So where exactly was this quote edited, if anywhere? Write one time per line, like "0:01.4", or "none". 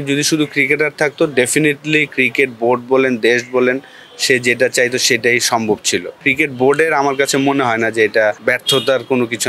0:06.1
0:08.4